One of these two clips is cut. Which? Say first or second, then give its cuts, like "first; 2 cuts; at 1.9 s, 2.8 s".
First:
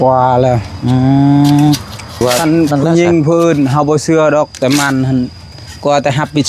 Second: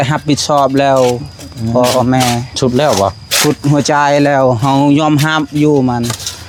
first; 1 cut; at 2.1 s